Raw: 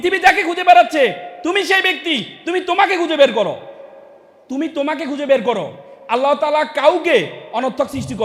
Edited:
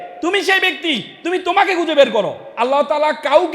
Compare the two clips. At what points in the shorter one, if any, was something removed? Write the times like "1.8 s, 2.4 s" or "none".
2.4 s